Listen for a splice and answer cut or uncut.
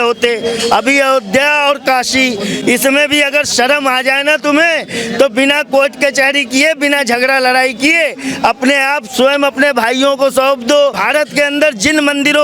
cut